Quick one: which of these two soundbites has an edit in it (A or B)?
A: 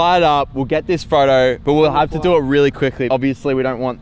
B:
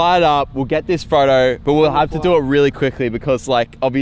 A